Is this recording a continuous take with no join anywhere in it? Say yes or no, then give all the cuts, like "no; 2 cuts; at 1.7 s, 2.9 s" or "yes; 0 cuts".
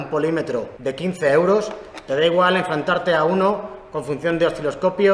yes; 0 cuts